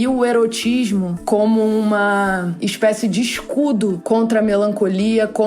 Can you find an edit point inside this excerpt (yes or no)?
yes